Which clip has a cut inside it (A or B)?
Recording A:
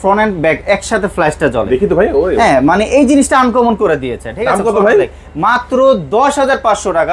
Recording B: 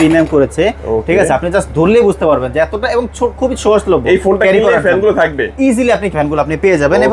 B